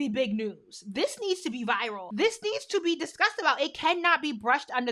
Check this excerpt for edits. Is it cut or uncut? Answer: cut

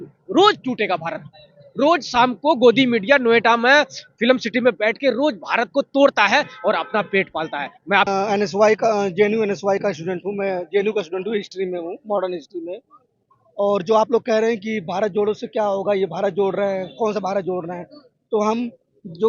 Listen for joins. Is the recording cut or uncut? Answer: uncut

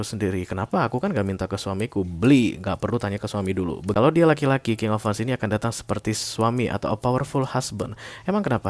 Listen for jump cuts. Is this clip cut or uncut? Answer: cut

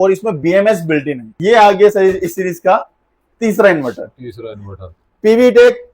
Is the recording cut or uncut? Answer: cut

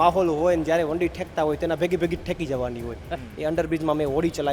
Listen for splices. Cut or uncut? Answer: cut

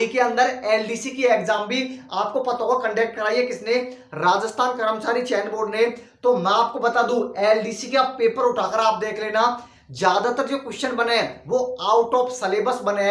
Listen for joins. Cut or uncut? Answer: uncut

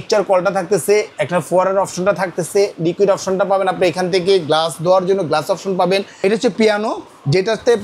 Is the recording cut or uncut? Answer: cut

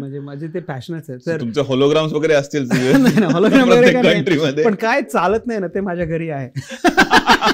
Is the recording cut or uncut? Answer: uncut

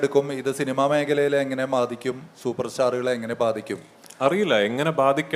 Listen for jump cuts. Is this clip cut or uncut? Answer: uncut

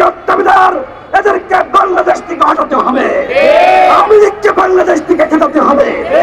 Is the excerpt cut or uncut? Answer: cut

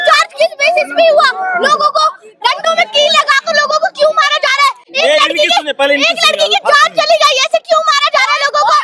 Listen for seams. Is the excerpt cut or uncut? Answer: uncut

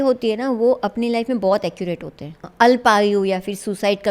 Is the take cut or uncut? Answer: cut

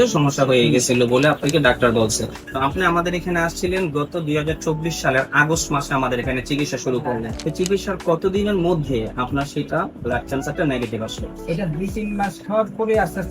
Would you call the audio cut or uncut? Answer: cut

